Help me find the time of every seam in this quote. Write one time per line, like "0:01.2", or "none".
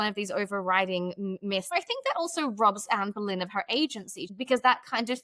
0:01.7
0:04.2